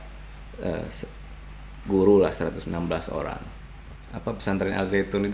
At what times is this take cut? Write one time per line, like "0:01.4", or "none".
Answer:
0:03.5

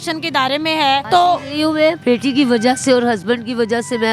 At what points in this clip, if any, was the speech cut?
0:01.0

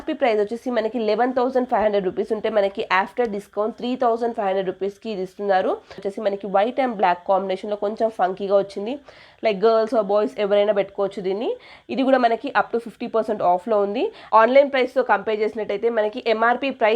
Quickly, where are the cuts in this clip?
0:06.1
0:14.3

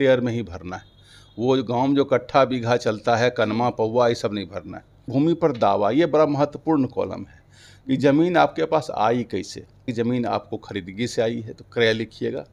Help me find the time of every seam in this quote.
0:05.1
0:09.9

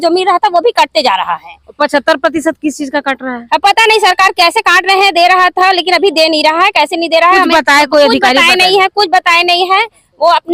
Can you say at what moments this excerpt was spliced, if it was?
none

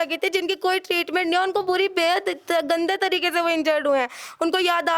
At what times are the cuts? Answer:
none

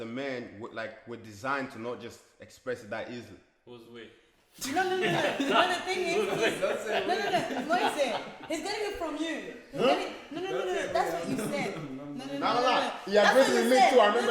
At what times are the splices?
none

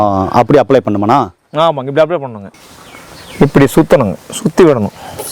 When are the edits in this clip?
0:02.5

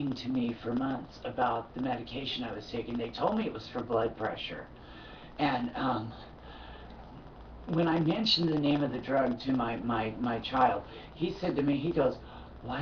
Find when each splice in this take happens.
none

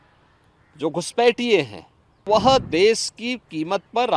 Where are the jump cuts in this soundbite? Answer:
0:02.3

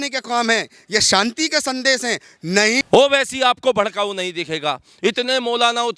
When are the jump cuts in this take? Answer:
0:02.8

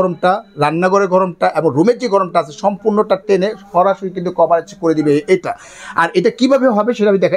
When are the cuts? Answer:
none

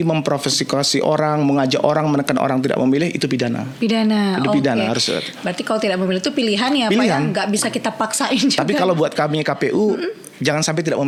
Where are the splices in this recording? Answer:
none

